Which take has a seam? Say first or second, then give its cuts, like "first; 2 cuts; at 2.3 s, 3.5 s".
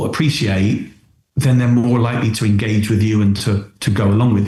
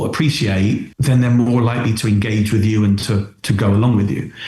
second; 1 cut; at 0.9 s